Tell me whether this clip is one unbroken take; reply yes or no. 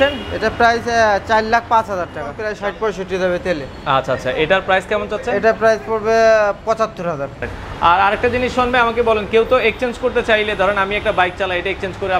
no